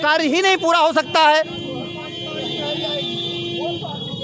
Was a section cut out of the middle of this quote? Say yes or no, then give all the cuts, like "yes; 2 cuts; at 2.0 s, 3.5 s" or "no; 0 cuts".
no; 0 cuts